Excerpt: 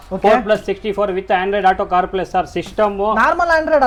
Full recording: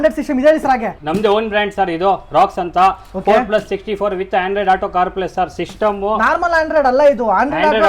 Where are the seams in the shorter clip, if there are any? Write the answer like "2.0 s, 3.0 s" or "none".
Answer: none